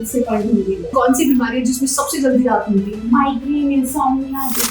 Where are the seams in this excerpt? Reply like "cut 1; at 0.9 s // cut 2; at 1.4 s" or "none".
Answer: cut 1; at 0.9 s